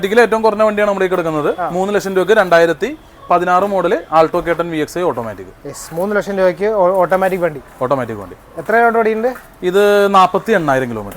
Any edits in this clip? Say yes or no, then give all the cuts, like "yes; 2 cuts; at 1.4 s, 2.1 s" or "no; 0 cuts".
no; 0 cuts